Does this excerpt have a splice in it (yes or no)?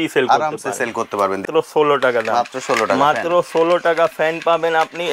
yes